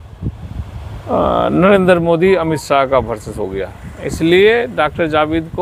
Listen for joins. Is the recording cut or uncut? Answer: uncut